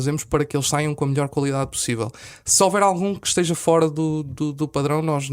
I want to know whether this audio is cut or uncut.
uncut